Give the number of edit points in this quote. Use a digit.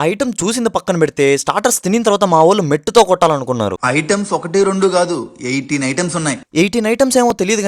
1